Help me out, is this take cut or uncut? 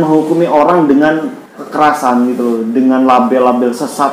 cut